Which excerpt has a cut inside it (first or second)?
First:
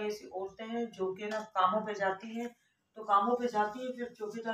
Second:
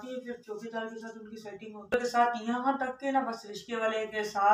second